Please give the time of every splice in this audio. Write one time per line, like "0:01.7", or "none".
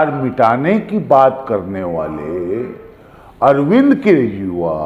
none